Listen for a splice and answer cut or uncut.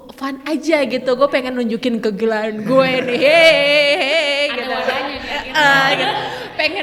uncut